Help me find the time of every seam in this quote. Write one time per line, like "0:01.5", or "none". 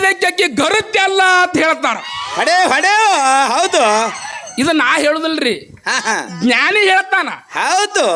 none